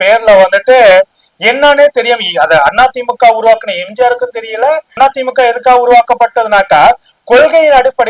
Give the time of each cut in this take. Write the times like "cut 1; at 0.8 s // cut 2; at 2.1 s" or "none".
cut 1; at 4.9 s